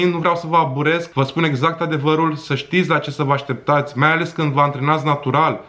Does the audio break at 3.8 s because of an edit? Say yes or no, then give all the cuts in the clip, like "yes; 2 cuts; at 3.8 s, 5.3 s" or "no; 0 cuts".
no; 1 cut; at 1.1 s